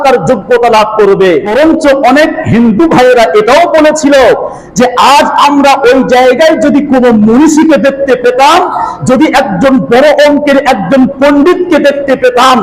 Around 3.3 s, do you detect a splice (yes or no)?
no